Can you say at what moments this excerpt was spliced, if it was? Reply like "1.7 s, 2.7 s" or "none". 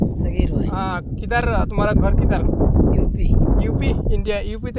none